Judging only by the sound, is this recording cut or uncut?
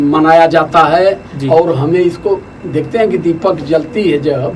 uncut